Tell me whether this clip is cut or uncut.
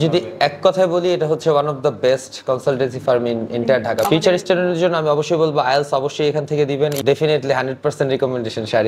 cut